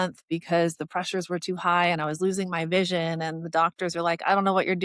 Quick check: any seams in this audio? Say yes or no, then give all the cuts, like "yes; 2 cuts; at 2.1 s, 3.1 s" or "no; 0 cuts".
no; 0 cuts